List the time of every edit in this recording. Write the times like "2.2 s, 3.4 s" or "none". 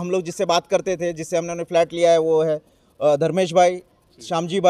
none